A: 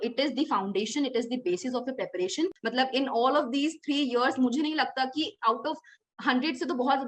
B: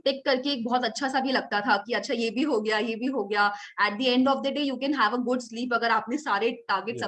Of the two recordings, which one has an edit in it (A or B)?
A